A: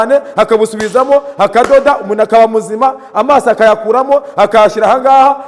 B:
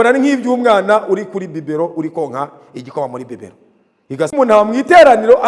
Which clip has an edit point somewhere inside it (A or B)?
B